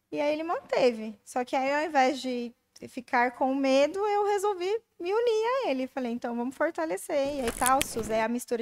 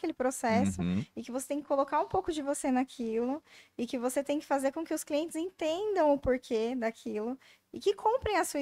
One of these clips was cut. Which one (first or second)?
first